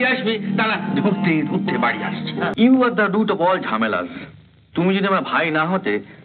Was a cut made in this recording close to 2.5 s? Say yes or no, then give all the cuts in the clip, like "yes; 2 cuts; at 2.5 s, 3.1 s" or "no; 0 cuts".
yes; 1 cut; at 2.5 s